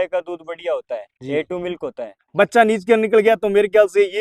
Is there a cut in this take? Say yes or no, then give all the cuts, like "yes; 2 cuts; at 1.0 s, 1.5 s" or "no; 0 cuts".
yes; 2 cuts; at 1.1 s, 2.2 s